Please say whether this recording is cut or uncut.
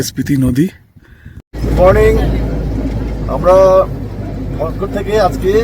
cut